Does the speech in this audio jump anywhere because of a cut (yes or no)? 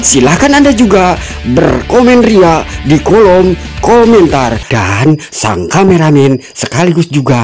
yes